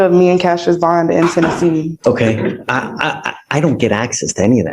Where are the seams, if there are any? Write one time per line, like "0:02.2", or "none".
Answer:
0:02.0